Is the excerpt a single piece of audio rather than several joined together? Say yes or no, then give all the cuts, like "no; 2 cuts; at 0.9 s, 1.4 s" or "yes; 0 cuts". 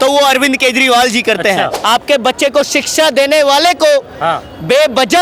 no; 1 cut; at 1.8 s